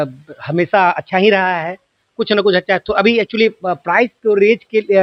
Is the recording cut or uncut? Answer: uncut